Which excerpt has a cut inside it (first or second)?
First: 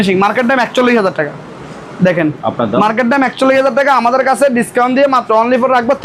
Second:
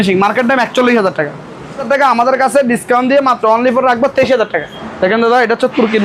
second